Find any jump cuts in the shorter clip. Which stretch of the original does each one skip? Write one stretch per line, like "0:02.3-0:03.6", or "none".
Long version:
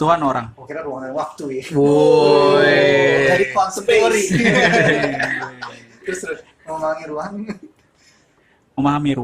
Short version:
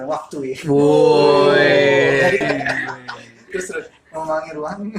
0:03.5-0:05.0